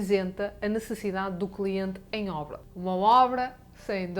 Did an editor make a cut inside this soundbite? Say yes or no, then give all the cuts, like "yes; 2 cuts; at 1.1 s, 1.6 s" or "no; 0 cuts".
yes; 1 cut; at 2.5 s